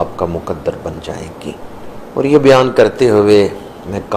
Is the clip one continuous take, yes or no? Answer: no